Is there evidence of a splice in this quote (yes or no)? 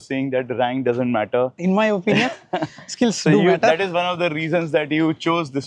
yes